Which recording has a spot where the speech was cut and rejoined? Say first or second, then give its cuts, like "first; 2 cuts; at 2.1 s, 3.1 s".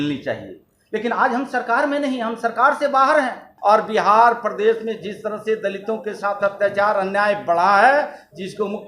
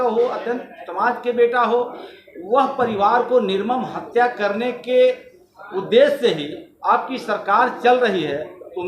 first; 1 cut; at 3.5 s